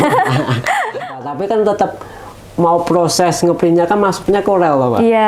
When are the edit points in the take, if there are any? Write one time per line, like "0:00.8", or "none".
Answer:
0:01.1